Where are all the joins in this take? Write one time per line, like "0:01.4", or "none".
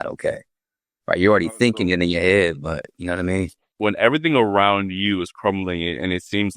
0:03.6